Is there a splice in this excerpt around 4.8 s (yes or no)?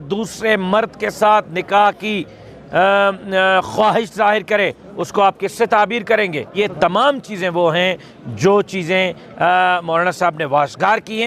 no